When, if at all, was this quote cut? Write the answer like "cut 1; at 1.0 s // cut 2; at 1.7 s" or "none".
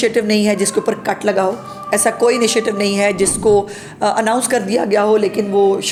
none